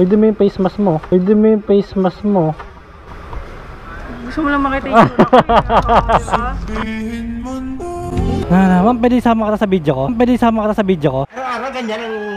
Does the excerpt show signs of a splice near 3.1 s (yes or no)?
yes